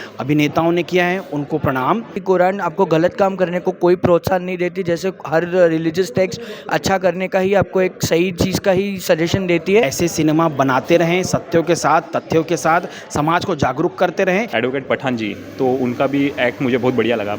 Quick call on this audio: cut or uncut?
cut